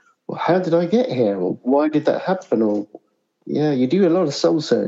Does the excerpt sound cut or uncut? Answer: cut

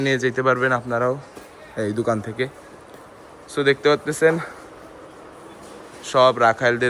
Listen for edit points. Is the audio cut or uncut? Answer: uncut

